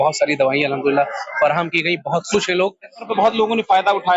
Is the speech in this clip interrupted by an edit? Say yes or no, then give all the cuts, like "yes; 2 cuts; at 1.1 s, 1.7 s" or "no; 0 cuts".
yes; 1 cut; at 3.1 s